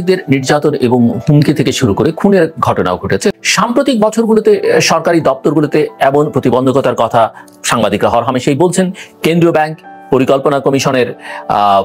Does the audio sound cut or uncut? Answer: cut